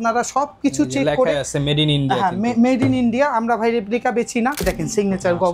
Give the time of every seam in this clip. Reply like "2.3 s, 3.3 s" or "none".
4.6 s